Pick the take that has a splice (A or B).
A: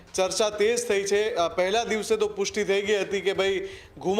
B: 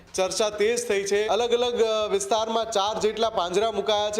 B